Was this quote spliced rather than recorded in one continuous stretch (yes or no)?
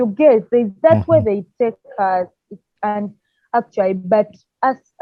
no